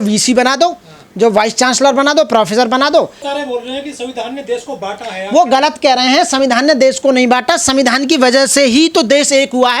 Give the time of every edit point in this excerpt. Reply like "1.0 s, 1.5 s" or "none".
3.2 s